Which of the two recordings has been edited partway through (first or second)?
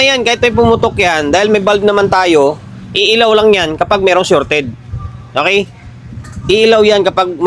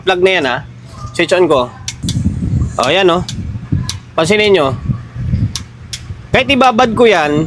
second